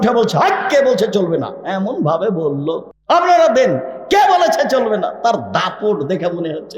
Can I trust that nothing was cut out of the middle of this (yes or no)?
no